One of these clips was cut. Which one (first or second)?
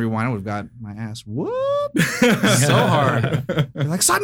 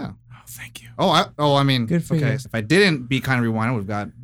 second